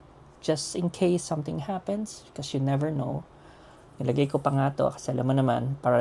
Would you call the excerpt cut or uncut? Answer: uncut